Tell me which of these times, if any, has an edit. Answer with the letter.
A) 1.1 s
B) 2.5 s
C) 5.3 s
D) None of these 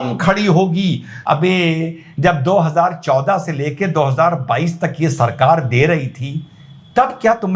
A